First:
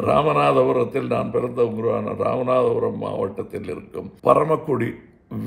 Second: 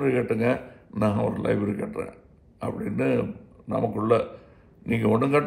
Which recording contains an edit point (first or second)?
first